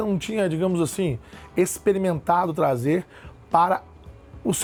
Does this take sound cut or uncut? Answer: uncut